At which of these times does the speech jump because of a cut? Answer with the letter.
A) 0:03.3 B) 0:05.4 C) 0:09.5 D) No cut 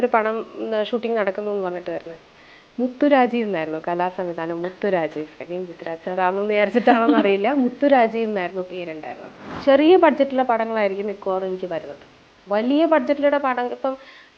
C